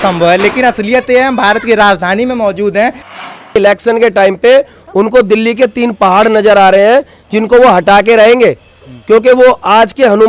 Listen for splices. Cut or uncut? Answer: cut